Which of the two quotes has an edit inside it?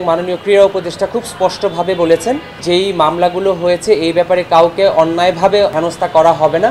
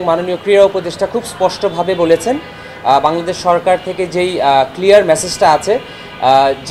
first; 2 cuts; at 2.6 s, 5.7 s

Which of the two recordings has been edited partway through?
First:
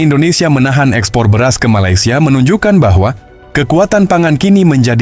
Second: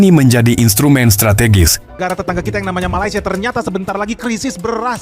second; 1 cut; at 1.9 s

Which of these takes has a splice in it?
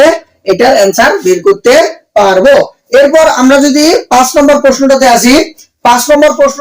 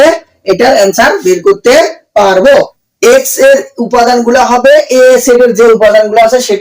second; 1 cut; at 2.8 s

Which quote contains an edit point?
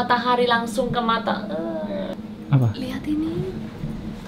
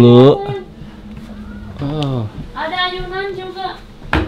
first; 1 cut; at 2.1 s

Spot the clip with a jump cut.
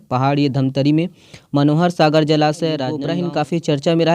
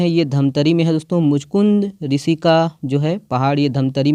first; 1 cut; at 3.0 s

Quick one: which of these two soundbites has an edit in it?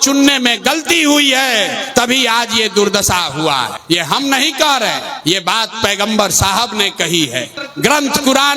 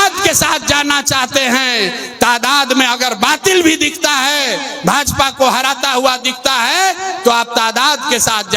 first; 4 cuts; at 1.8 s, 3.8 s, 5.1 s, 7.6 s

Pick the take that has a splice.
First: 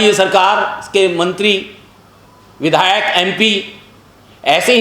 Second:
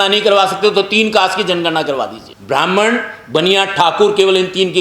second; 1 cut; at 2.3 s

